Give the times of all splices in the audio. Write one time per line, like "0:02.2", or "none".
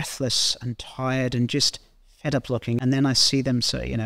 0:02.8